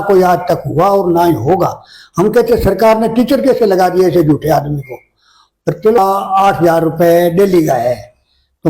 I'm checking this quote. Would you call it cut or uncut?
cut